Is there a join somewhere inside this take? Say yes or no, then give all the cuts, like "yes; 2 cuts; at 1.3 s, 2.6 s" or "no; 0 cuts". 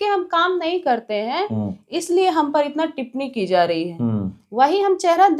no; 0 cuts